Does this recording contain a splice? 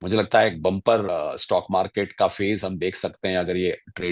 yes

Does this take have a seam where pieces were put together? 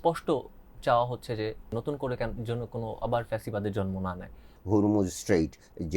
yes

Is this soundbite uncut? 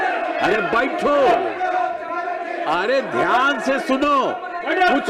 yes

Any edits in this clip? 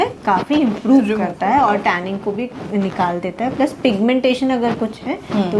no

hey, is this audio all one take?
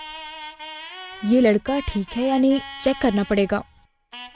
no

